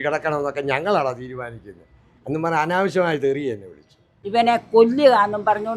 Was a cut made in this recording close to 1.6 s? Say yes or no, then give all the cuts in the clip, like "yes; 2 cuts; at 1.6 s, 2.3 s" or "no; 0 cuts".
no; 1 cut; at 4.1 s